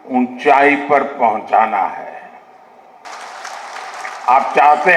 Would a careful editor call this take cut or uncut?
cut